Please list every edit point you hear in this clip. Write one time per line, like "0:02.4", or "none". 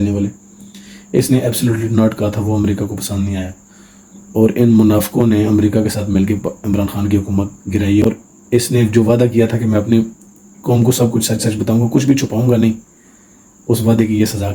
0:08.0